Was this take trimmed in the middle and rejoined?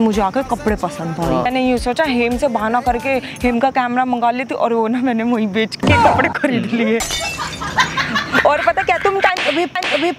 yes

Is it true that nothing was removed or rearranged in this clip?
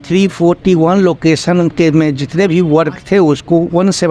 yes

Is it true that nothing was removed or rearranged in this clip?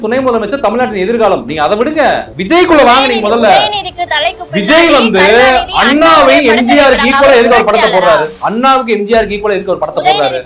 yes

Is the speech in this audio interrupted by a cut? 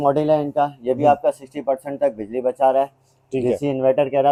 no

